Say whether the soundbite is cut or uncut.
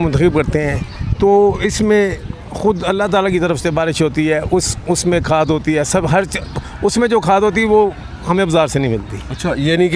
uncut